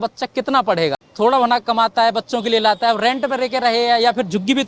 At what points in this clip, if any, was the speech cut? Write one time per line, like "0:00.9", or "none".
0:01.0